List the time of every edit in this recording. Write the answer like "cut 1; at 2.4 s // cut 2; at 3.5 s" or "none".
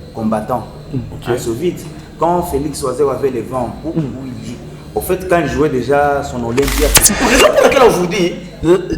cut 1; at 7.0 s

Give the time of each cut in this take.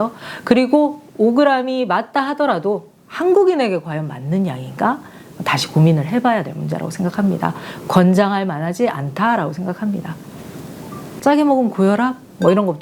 cut 1; at 11.0 s

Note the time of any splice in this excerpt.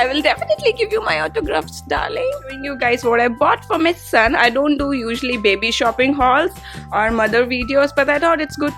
cut 1; at 2.7 s

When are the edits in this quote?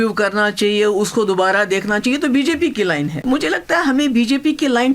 cut 1; at 3.2 s

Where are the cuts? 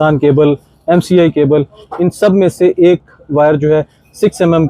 none

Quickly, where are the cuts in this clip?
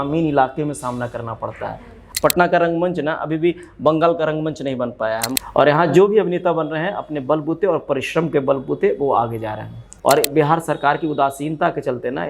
cut 1; at 2.0 s // cut 2; at 5.3 s // cut 3; at 9.8 s

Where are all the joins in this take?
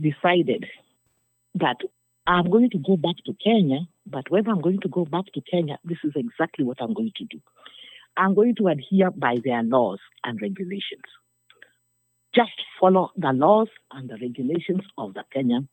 none

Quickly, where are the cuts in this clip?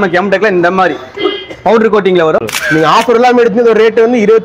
cut 1; at 2.4 s

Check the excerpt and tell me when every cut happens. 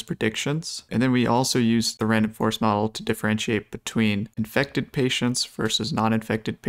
cut 1; at 4.3 s

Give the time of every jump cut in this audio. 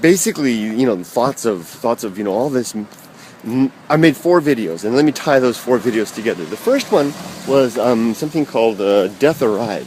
cut 1; at 1.1 s

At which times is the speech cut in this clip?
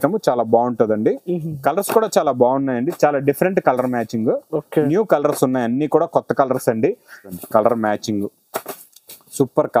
cut 1; at 7.4 s

